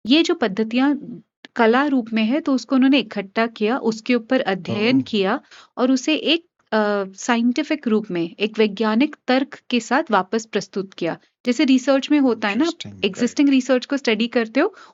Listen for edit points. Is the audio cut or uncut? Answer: uncut